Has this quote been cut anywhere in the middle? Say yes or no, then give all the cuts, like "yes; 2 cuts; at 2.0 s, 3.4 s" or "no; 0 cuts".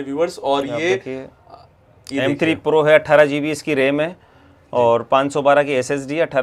no; 0 cuts